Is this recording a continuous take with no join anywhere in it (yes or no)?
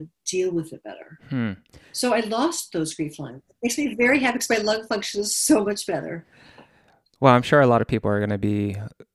yes